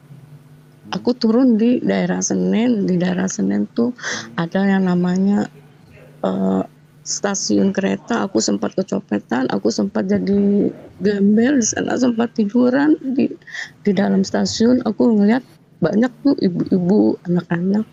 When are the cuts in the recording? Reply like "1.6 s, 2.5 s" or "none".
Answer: none